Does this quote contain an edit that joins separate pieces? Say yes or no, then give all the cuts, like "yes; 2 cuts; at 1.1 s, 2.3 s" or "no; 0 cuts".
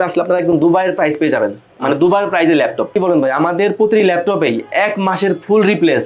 yes; 1 cut; at 2.9 s